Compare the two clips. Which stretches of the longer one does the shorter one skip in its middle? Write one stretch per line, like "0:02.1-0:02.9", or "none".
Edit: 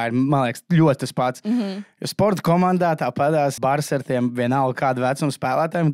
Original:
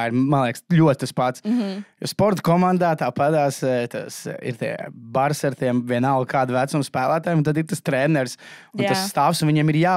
0:03.6-0:05.1